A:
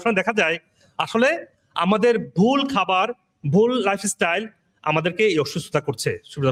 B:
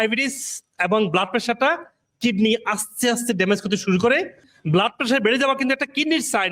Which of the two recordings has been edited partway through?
B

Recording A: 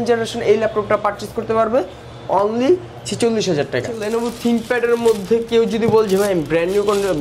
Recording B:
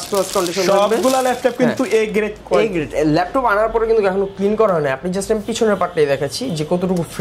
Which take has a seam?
A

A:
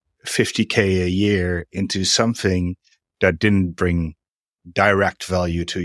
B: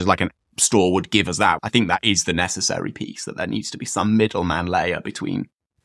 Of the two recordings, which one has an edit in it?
B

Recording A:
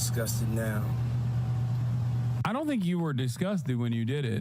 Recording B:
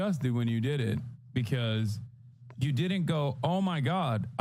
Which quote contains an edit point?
A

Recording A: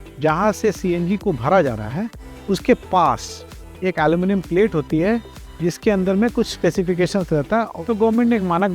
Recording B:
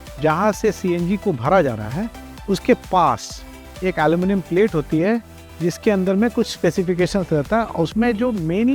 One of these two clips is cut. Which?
A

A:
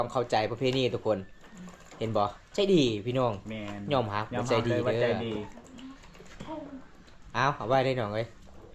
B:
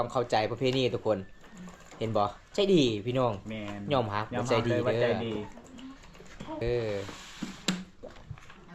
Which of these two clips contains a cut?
B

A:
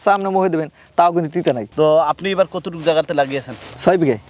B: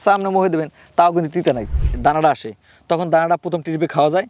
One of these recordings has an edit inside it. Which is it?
B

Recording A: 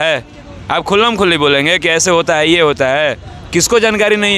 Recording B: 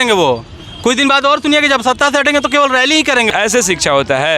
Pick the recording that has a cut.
B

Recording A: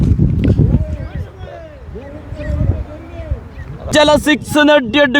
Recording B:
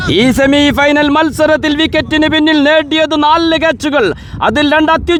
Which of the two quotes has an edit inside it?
A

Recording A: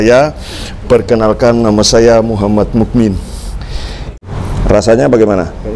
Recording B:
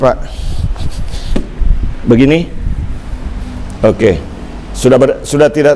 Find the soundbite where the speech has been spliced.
A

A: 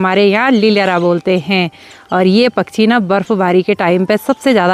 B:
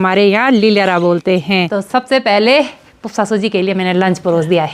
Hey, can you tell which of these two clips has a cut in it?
B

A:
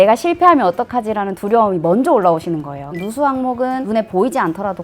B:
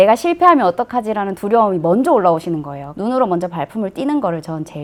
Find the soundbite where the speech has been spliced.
A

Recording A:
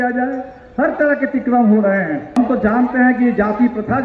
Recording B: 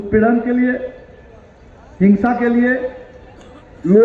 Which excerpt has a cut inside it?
A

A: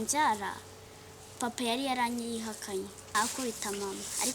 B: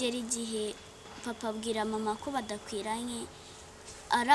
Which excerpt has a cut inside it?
A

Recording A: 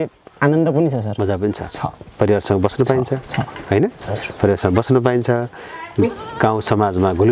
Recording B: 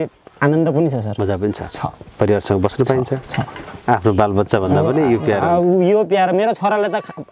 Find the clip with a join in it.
B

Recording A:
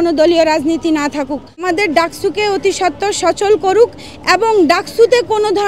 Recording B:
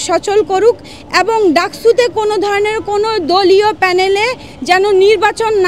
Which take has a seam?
A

